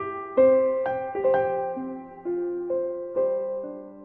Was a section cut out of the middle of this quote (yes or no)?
no